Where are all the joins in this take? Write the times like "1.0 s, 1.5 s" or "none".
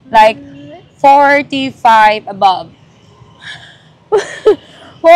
none